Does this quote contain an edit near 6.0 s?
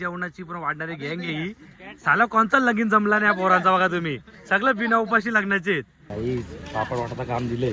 yes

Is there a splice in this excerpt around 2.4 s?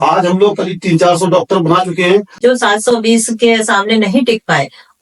yes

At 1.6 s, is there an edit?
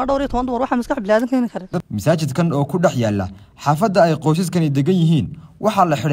yes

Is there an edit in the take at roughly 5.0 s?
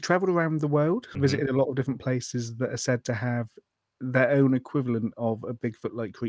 no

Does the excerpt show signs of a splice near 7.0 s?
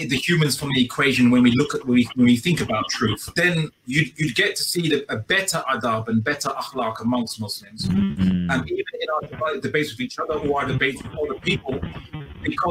no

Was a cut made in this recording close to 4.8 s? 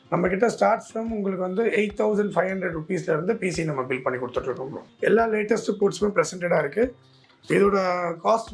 yes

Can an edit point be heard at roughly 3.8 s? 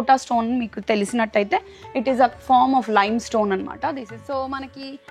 yes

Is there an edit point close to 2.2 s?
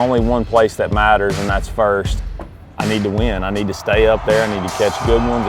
yes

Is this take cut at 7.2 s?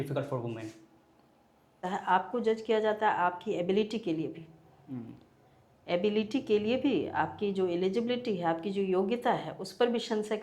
no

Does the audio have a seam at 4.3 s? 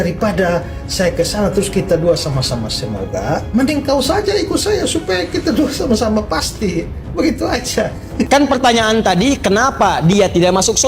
no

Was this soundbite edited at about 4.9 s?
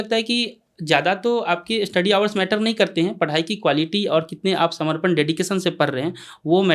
no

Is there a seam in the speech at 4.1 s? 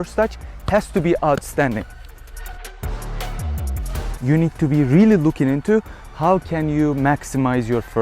yes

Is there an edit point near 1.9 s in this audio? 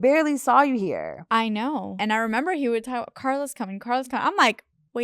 yes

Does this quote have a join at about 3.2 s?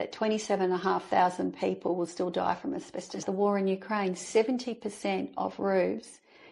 yes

